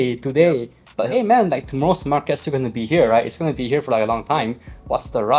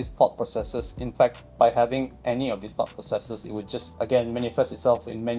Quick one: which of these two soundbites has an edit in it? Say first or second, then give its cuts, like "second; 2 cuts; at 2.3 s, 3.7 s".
second; 3 cuts; at 1.4 s, 2.1 s, 3.9 s